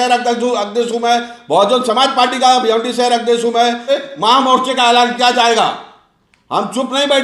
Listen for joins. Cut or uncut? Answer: cut